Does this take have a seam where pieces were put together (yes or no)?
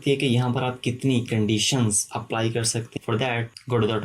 yes